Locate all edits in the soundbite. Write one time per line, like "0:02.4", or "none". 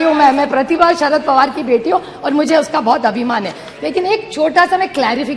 none